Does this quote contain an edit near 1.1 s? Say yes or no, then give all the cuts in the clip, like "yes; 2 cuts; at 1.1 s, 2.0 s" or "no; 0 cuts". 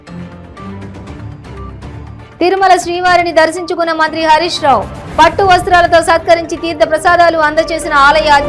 no; 1 cut; at 2.3 s